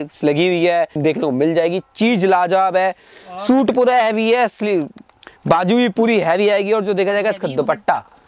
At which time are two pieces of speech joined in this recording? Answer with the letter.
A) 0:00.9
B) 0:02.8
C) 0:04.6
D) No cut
A